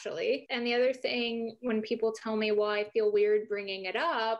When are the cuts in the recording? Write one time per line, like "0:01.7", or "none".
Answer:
none